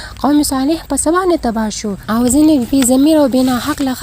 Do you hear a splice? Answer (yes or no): yes